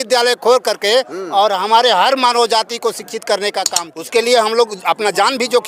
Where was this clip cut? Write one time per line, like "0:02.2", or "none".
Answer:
0:03.8